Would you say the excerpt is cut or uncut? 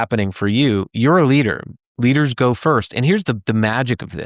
uncut